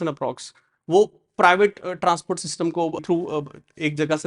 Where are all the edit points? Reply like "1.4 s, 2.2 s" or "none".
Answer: 3.0 s